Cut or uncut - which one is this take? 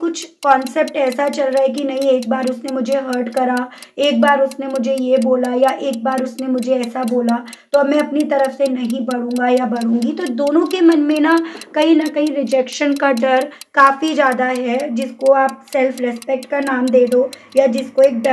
uncut